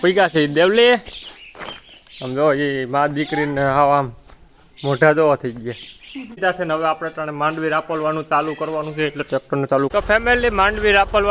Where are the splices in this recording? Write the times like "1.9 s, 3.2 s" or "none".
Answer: 6.4 s, 9.9 s